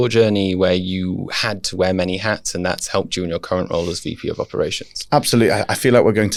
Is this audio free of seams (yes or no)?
yes